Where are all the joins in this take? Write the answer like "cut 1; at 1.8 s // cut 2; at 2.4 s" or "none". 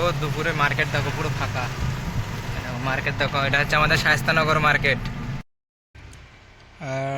cut 1; at 5.4 s